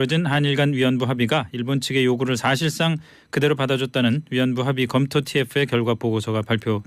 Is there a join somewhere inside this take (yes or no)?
no